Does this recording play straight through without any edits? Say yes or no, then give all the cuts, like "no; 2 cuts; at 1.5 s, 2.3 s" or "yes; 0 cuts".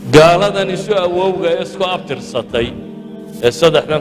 no; 1 cut; at 2.8 s